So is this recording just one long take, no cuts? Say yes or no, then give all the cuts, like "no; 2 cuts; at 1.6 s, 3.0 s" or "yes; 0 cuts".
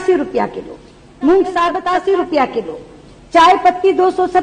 no; 1 cut; at 1.8 s